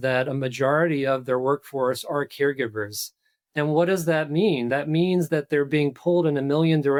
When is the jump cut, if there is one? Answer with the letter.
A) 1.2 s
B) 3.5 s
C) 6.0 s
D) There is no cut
D